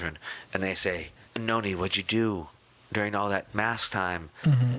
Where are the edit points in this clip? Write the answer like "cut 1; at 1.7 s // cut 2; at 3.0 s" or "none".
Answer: cut 1; at 1.2 s